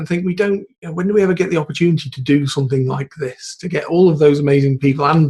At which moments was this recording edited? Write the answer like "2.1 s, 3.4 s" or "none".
none